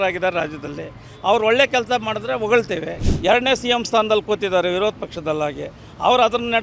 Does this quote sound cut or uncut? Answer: cut